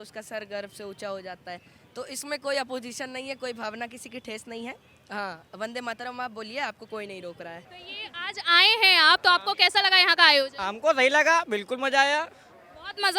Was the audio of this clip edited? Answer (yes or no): no